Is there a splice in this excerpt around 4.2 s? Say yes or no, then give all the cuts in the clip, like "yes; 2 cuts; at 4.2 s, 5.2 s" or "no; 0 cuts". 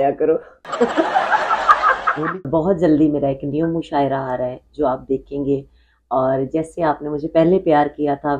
no; 1 cut; at 2.4 s